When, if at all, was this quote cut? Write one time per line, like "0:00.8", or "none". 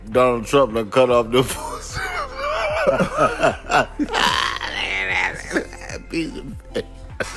none